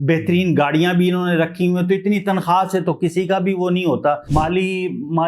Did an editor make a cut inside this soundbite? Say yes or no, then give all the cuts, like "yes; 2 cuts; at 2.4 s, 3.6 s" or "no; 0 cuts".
yes; 1 cut; at 4.2 s